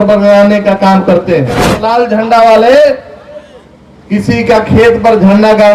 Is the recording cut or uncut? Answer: cut